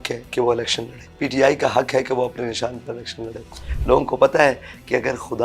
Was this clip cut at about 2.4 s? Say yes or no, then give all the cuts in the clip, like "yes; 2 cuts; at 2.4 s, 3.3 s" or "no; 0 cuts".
no; 2 cuts; at 1.0 s, 3.7 s